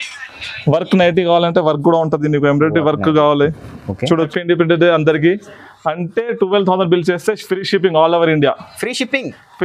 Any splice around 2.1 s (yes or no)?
no